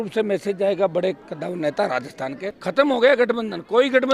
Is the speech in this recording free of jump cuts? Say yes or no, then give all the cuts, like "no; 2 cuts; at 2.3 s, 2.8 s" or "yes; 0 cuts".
no; 1 cut; at 2.6 s